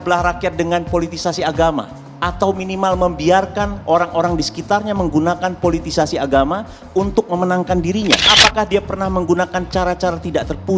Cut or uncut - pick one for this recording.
cut